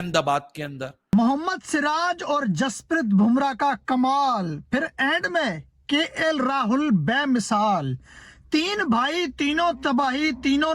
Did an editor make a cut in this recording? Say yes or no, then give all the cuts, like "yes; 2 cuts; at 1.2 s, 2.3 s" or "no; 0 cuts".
yes; 1 cut; at 1.1 s